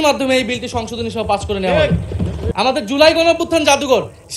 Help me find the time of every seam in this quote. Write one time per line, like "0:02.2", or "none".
0:02.4